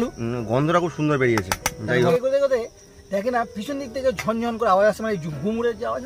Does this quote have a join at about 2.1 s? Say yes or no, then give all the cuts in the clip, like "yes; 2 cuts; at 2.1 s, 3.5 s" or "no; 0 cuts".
yes; 1 cut; at 2.1 s